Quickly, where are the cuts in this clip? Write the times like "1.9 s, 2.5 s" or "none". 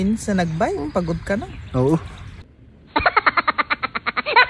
none